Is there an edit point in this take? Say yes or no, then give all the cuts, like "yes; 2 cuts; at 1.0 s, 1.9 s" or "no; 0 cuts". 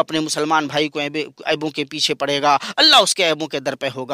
no; 0 cuts